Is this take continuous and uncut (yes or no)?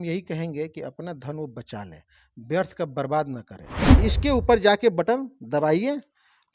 no